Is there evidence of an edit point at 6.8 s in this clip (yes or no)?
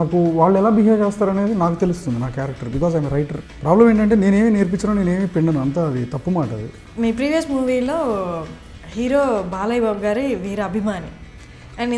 yes